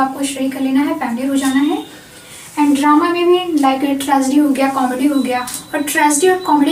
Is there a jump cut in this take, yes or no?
no